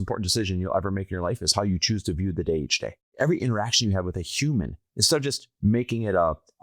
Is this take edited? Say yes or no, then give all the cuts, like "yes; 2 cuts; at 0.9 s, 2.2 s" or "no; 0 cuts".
yes; 1 cut; at 3.0 s